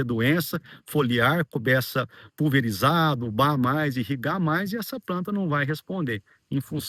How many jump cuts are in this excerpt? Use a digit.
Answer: 0